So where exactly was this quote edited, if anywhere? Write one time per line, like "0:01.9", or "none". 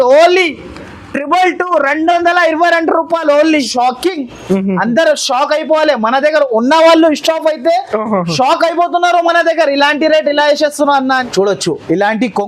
0:03.6
0:11.3